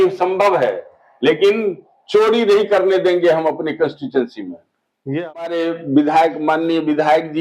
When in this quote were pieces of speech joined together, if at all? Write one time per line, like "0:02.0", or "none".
0:05.4